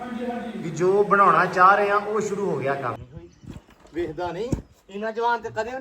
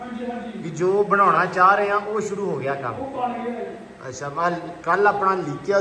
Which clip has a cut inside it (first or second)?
first